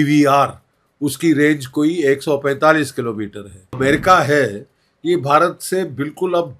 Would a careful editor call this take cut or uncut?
cut